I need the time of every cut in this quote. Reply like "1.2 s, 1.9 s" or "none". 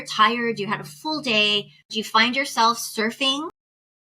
1.9 s

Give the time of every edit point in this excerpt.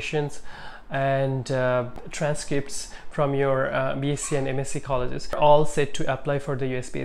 2.0 s, 5.4 s

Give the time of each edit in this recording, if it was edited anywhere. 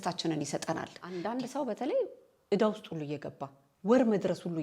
1.0 s

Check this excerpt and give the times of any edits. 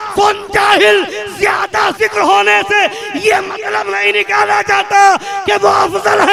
none

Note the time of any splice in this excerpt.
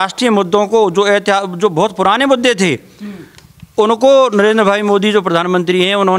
none

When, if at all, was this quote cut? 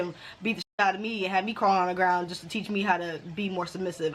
none

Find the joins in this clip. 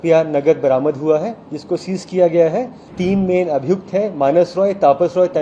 2.9 s

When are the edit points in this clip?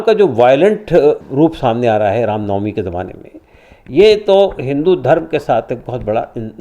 1.2 s

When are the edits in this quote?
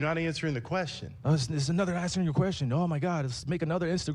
1.8 s

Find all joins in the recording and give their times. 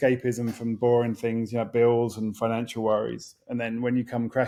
none

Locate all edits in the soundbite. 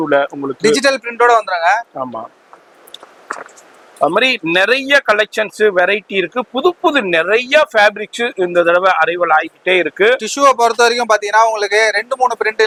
none

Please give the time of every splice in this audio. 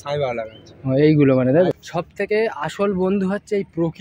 1.7 s

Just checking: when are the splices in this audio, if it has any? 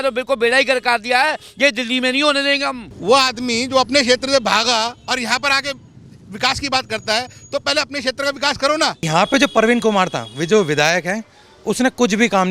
2.9 s, 9.1 s

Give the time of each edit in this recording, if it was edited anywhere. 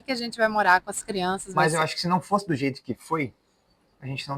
1.4 s

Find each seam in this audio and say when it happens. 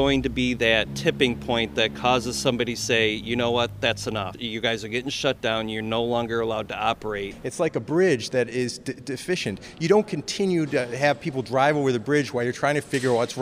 0.9 s, 4.4 s, 7.4 s

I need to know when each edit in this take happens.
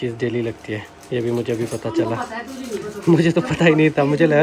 none

